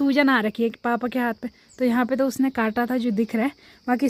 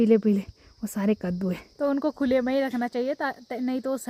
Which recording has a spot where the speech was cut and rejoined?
second; 1 cut; at 1.7 s

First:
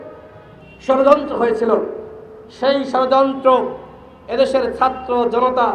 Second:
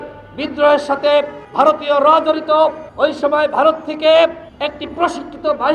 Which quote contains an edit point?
second; 3 cuts; at 1.4 s, 2.8 s, 4.5 s

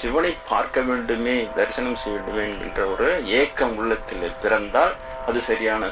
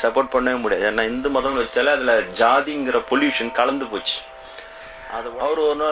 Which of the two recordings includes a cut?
second; 1 cut; at 5.0 s

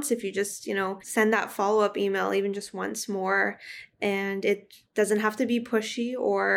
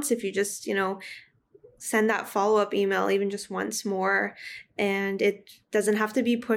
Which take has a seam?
first; 1 cut; at 1.0 s

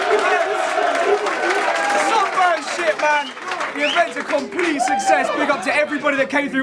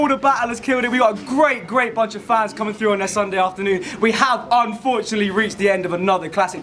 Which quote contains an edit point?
second; 1 cut; at 1.9 s

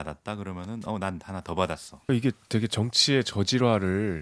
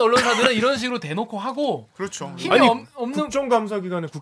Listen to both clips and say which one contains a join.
first; 1 cut; at 1.9 s

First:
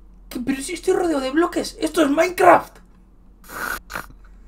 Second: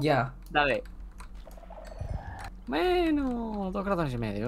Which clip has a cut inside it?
second; 1 cut; at 2.4 s

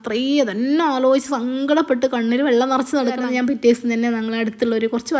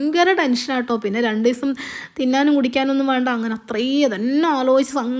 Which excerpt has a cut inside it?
first; 1 cut; at 3.2 s

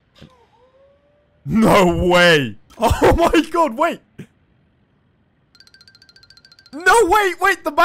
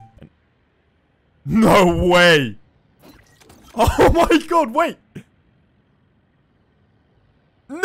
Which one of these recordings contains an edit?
first; 1 cut; at 2.6 s

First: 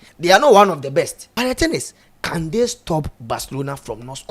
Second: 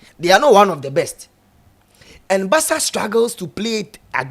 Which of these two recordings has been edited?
first; 1 cut; at 1.2 s

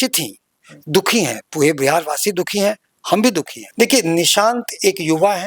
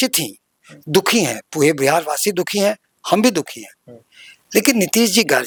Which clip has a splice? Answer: first; 1 cut; at 3.6 s

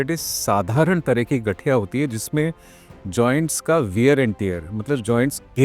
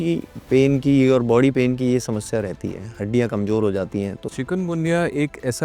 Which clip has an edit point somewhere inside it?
second; 1 cut; at 4.2 s

